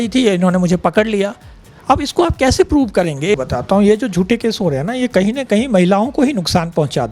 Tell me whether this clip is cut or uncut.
cut